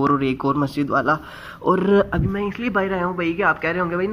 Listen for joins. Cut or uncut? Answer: uncut